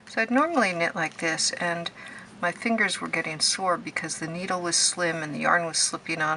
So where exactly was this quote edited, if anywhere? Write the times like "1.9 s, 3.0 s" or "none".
none

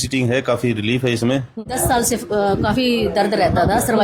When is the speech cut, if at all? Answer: 1.7 s

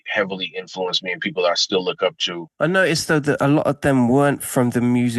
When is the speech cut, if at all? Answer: 2.4 s

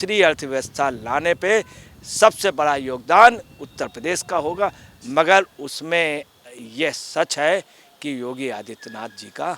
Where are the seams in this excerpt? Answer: none

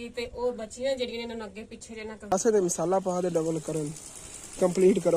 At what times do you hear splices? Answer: 2.5 s

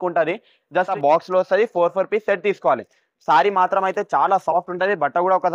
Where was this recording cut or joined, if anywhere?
0.9 s

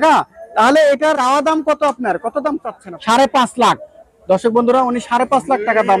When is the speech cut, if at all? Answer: 1.2 s, 2.8 s

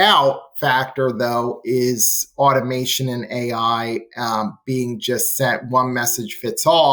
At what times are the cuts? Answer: none

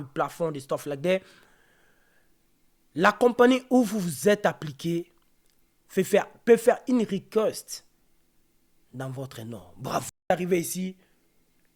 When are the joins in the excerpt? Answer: 10.1 s

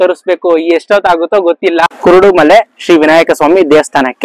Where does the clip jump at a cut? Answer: 1.8 s

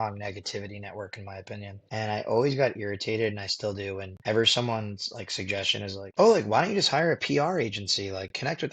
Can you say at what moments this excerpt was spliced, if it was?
1.8 s

